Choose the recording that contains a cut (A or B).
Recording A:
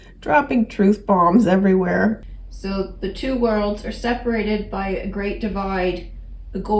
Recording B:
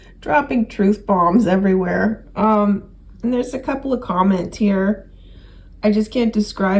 A